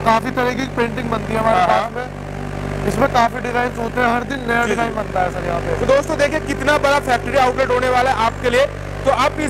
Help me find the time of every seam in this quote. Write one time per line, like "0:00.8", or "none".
none